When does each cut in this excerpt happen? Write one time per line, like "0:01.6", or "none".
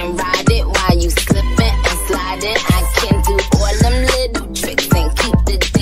none

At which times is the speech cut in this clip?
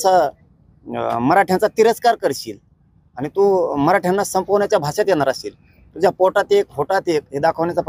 none

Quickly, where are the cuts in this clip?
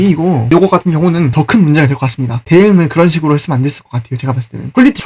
0:01.3
0:02.4

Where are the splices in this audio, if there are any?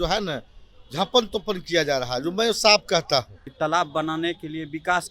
0:03.4

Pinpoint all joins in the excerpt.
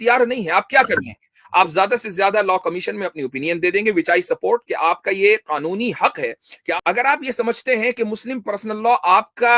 0:06.6

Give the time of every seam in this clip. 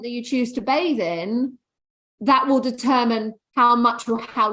0:03.4

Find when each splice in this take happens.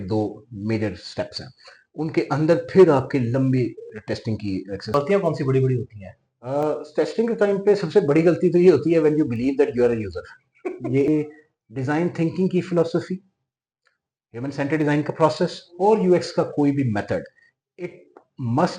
0:04.9
0:11.1

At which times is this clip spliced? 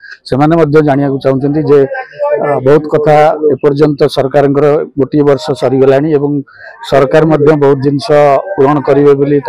none

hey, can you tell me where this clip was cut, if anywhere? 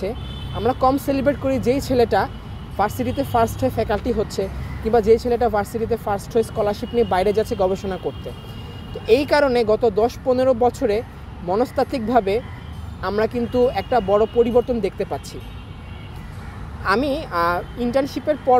none

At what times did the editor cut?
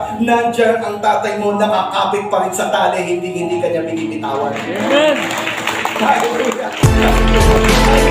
0:06.7

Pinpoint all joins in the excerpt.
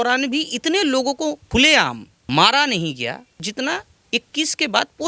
0:01.6
0:03.3

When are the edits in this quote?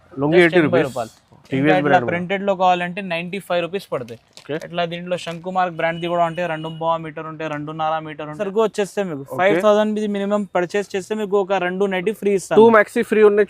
0:08.4

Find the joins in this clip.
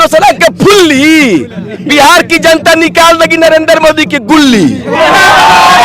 none

